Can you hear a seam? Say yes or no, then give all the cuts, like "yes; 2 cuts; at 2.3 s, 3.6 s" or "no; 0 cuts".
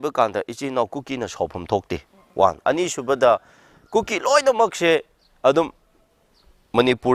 no; 0 cuts